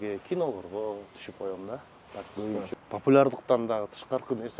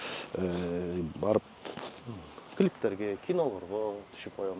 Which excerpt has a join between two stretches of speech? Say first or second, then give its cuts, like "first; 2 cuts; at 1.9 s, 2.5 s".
first; 1 cut; at 2.7 s